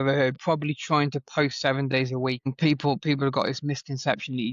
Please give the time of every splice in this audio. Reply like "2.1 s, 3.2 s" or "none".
2.5 s